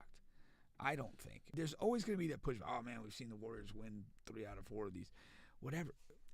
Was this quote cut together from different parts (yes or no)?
yes